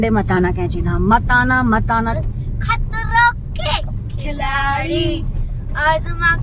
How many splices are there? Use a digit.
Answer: 1